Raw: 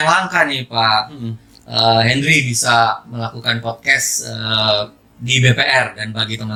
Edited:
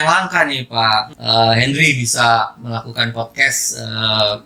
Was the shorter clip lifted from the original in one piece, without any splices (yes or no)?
no